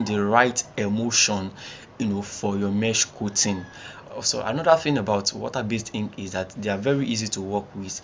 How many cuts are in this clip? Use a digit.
1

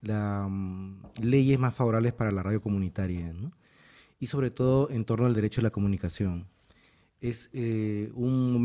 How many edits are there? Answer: 0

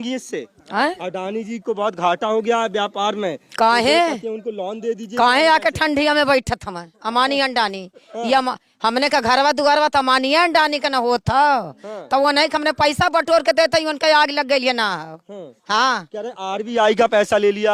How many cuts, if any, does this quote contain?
0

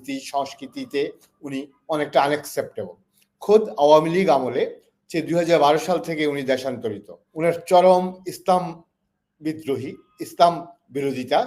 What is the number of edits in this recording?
1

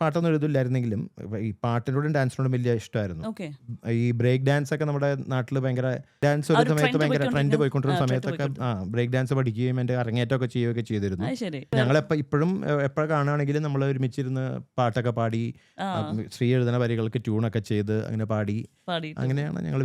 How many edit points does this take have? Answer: 2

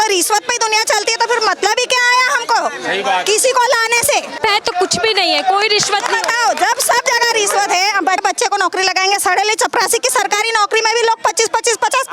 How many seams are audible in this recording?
2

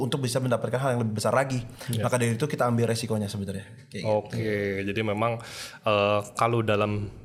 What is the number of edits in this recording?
0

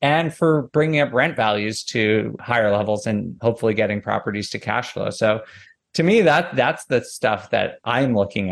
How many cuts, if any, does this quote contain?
1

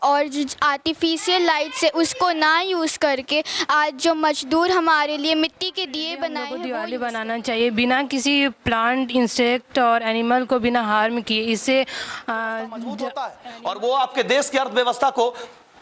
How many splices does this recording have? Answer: 2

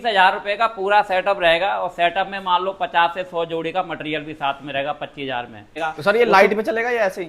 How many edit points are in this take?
1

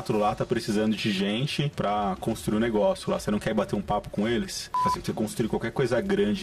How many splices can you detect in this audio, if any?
2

